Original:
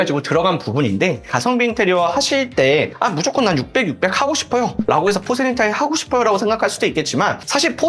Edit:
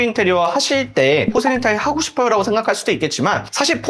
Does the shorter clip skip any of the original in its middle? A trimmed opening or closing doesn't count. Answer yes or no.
yes